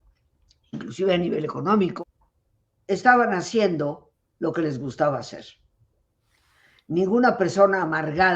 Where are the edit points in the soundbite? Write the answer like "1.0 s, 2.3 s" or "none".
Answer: 2.0 s